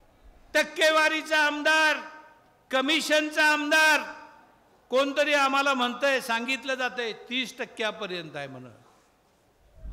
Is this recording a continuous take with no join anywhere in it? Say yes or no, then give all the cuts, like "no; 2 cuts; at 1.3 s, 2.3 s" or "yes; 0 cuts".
yes; 0 cuts